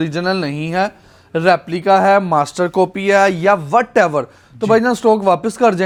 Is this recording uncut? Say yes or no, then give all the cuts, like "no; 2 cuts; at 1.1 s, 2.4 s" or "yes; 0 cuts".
yes; 0 cuts